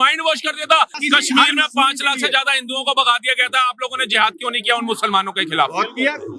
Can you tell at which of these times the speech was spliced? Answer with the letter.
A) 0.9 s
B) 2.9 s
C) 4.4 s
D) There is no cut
A